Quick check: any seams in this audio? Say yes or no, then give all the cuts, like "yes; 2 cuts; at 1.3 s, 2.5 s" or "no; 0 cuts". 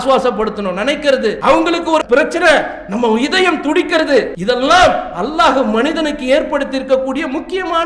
yes; 2 cuts; at 1.4 s, 4.3 s